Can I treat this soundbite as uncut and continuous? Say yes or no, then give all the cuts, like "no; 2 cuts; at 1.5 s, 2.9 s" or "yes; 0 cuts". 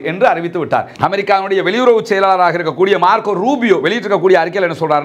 no; 1 cut; at 0.9 s